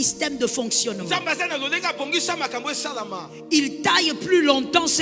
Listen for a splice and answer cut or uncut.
uncut